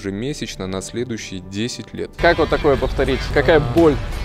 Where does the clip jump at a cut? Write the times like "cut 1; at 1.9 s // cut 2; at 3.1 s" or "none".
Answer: cut 1; at 2.1 s // cut 2; at 3.3 s